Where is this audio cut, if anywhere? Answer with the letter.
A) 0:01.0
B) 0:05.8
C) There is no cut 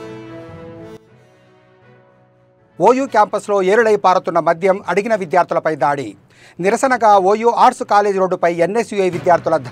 A